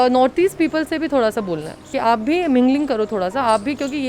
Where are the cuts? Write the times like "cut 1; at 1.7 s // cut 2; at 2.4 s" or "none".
cut 1; at 1.9 s